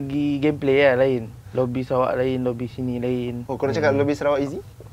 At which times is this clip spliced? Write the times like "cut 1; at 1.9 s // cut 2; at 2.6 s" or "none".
cut 1; at 1.4 s // cut 2; at 3.4 s